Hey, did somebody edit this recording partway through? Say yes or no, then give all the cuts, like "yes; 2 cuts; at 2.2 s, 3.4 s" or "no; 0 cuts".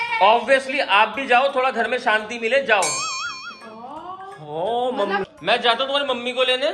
yes; 1 cut; at 5.3 s